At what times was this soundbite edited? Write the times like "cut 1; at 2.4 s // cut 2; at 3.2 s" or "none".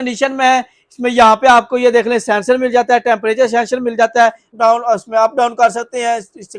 cut 1; at 4.5 s